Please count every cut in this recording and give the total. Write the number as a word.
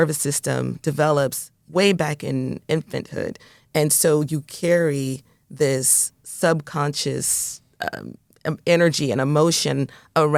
zero